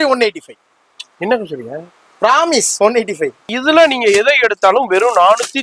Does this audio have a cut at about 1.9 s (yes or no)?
no